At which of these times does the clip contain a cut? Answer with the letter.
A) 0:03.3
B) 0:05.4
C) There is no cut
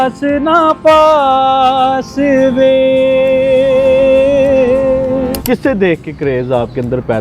B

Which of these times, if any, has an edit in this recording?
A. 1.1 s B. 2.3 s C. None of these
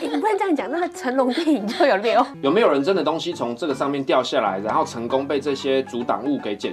B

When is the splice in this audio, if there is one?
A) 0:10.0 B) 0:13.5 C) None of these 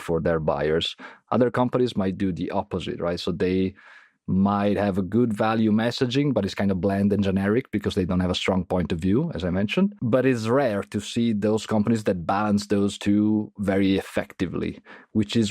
A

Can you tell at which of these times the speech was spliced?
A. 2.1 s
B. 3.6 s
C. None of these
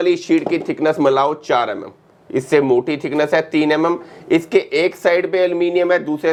C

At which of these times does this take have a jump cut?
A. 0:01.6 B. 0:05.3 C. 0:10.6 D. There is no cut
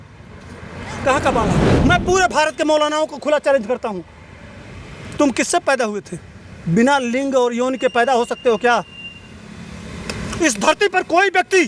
A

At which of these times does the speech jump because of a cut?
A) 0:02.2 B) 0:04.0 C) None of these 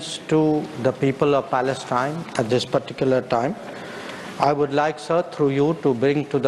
C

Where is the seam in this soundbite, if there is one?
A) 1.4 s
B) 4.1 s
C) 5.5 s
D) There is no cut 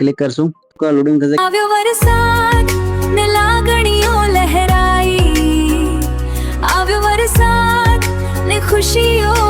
A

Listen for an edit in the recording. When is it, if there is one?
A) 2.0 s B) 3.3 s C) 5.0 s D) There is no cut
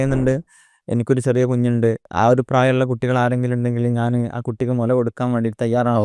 A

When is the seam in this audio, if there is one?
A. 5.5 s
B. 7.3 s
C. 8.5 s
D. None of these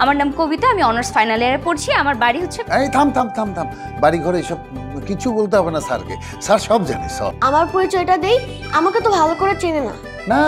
B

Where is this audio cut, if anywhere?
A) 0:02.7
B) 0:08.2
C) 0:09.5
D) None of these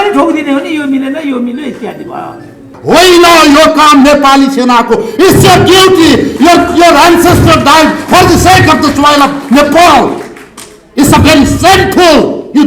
A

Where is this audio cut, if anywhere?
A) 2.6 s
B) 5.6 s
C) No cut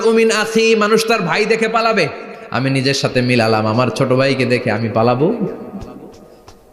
A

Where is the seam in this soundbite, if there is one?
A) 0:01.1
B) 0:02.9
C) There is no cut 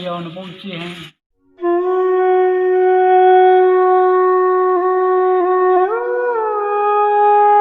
A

